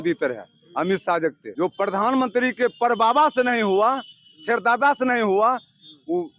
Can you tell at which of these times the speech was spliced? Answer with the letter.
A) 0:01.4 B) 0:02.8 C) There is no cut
A